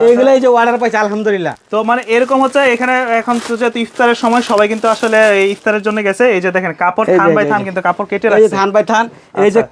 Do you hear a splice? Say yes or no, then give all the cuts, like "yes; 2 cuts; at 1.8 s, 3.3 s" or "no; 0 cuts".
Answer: no; 0 cuts